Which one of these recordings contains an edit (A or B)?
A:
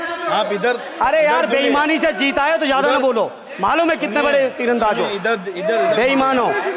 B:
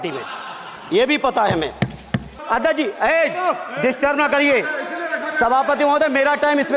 B